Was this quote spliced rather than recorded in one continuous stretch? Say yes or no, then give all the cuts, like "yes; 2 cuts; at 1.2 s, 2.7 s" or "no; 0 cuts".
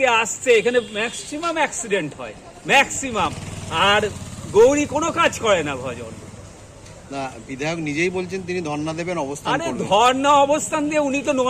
no; 0 cuts